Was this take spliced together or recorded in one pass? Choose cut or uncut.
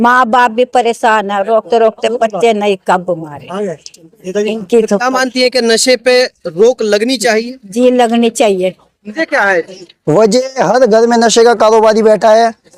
cut